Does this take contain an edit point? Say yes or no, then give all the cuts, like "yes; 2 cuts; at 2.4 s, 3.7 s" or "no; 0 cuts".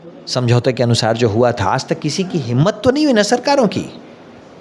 no; 0 cuts